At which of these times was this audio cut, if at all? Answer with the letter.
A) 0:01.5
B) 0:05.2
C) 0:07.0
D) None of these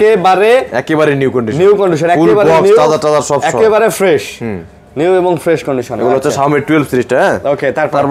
D